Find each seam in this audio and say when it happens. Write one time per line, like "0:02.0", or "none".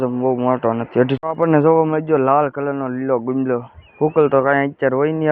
0:01.2